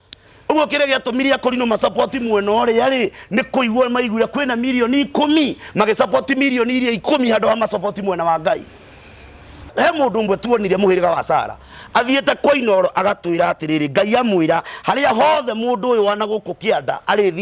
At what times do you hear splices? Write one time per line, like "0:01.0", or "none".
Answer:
0:09.7

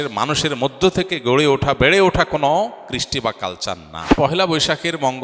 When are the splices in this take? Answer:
0:04.0

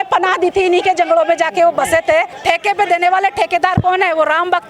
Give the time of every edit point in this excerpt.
0:02.3

